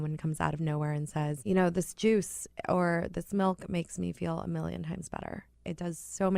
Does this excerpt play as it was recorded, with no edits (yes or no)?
no